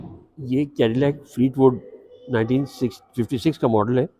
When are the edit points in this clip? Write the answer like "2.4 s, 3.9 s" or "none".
none